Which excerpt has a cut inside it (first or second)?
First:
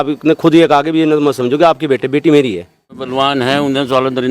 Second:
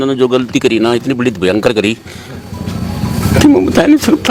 first